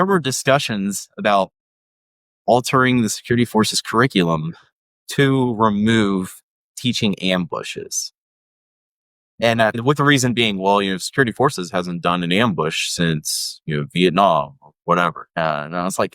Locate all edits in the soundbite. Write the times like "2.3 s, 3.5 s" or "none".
9.8 s, 15.2 s